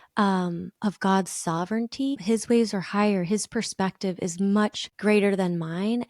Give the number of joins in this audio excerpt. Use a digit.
1